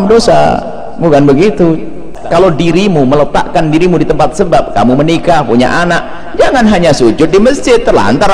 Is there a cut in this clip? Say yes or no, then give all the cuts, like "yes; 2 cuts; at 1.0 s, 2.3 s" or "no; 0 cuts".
yes; 1 cut; at 2.1 s